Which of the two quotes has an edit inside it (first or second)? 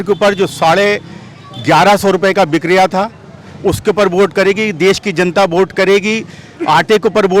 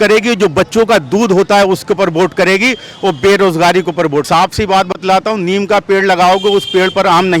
second